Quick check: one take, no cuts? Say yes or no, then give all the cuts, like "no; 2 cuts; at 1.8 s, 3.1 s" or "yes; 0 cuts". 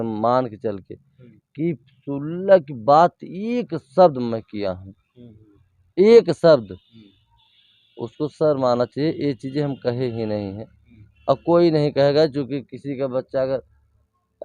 yes; 0 cuts